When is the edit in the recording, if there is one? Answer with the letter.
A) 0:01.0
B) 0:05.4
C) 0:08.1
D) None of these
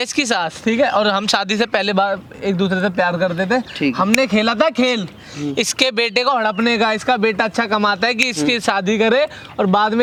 D